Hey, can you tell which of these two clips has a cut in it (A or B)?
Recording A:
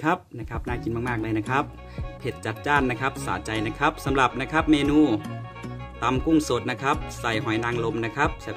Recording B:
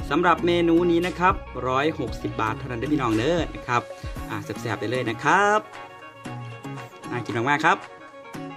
B